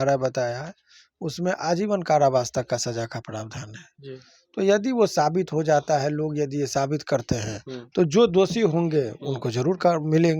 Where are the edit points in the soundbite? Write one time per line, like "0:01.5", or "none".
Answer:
none